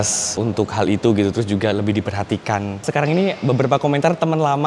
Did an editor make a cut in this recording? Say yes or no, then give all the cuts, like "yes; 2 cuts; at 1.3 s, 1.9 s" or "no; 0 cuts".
yes; 1 cut; at 2.8 s